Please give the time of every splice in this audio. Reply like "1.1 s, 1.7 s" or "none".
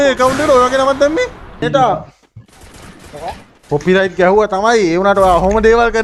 1.6 s